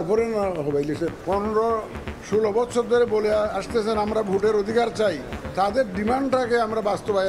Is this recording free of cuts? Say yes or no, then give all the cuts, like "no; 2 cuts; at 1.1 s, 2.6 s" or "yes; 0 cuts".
no; 2 cuts; at 1.1 s, 5.3 s